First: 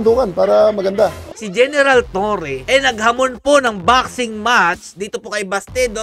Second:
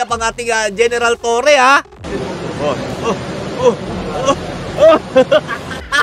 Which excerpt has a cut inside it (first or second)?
first